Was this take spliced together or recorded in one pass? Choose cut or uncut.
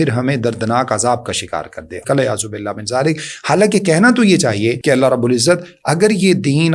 cut